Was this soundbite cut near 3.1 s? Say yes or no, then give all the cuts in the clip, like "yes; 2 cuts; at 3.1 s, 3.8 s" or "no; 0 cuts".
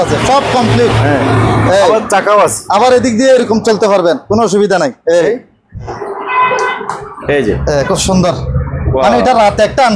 no; 1 cut; at 6.1 s